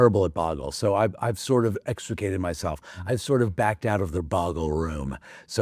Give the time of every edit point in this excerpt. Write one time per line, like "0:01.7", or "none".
none